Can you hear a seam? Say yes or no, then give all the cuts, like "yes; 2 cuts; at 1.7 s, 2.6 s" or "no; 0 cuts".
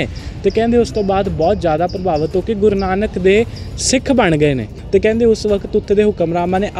yes; 1 cut; at 4.7 s